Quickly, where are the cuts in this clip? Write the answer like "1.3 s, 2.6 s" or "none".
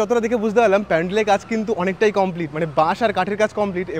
none